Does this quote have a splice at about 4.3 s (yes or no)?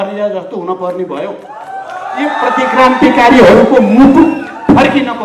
no